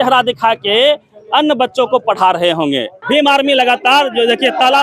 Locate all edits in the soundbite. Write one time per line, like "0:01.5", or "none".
0:02.9